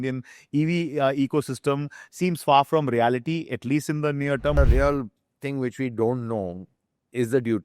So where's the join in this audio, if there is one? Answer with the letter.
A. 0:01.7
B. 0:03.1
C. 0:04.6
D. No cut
C